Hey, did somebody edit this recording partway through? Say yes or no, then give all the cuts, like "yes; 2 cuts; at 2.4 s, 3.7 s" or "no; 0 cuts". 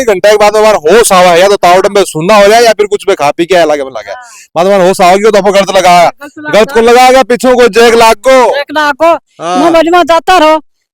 no; 0 cuts